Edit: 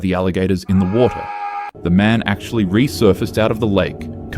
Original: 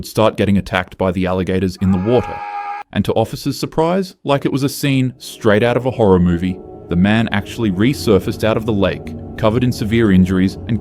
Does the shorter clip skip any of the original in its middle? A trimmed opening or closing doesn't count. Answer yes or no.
yes